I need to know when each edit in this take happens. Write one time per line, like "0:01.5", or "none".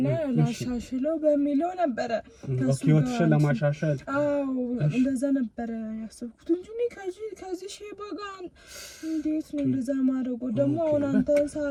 none